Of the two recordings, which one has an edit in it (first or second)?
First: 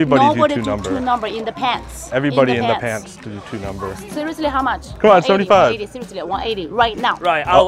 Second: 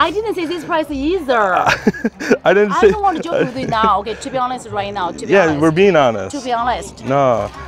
first